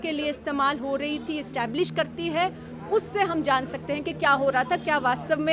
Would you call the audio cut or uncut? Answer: uncut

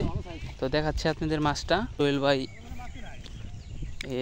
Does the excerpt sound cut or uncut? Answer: cut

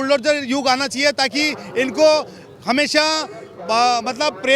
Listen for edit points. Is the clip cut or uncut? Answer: uncut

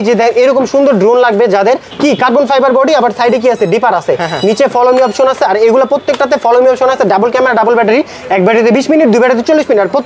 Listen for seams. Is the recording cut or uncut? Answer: uncut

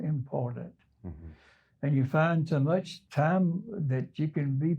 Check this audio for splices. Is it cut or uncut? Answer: cut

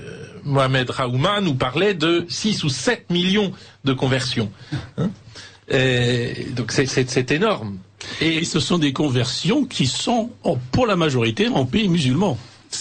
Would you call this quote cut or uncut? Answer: uncut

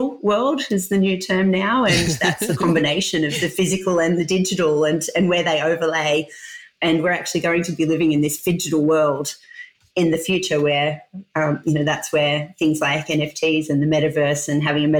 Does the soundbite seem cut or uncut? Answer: uncut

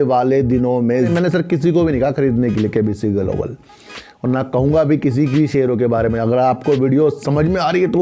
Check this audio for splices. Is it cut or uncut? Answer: cut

